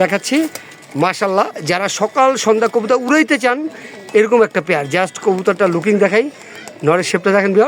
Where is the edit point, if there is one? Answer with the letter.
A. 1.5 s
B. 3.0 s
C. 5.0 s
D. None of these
D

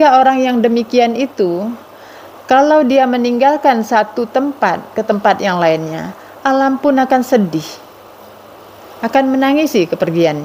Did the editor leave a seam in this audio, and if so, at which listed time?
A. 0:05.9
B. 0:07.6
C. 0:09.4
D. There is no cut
D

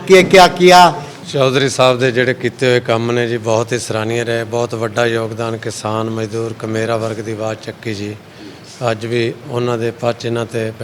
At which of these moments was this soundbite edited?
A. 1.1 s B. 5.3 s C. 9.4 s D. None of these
A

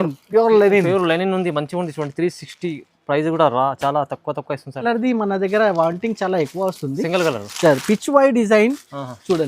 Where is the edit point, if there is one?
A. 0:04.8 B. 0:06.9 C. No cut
A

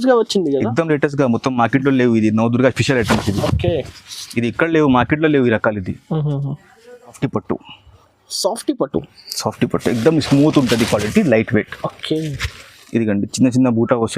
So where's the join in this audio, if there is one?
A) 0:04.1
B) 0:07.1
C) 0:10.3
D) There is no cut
B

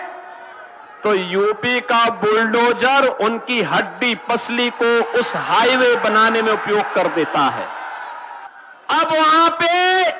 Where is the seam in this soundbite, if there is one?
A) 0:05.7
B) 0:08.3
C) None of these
B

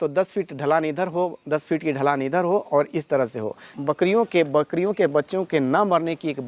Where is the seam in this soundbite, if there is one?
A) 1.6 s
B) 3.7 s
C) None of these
B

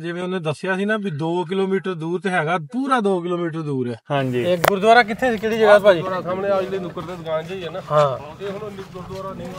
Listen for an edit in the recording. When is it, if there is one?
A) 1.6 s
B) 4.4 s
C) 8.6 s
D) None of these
B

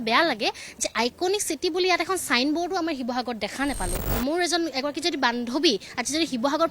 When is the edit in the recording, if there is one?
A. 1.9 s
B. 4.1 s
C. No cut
B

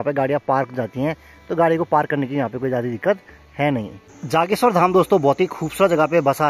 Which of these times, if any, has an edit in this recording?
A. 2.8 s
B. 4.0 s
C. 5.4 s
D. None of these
B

